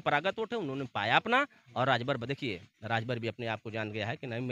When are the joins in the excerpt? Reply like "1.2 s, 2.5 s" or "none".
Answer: none